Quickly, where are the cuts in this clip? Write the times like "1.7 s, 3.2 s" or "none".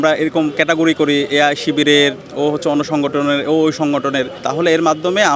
4.4 s